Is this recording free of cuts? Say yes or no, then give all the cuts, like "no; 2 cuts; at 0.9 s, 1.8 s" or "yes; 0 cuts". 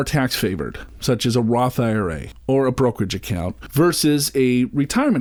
yes; 0 cuts